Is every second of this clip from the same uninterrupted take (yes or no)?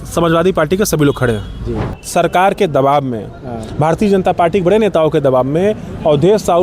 no